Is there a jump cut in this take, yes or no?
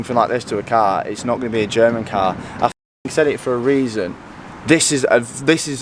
no